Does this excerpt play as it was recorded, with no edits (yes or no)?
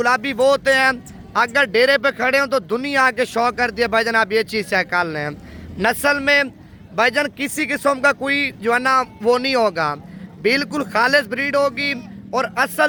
yes